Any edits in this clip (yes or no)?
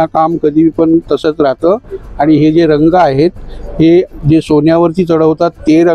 no